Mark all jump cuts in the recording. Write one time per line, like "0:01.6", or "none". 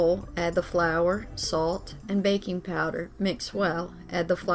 none